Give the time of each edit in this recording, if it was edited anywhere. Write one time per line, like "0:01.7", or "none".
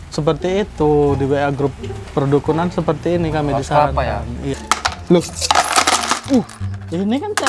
0:04.6